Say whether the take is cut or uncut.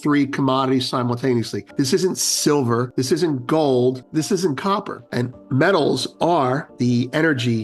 cut